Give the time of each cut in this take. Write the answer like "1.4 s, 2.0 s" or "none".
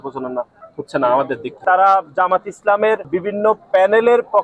1.6 s, 3.1 s